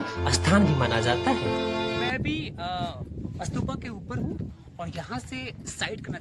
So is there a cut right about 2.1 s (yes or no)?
yes